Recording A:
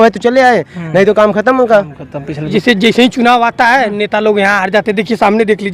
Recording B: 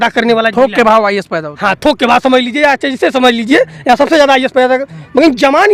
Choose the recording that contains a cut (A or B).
A